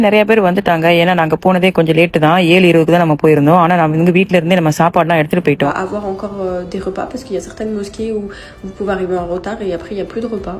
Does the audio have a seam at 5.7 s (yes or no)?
yes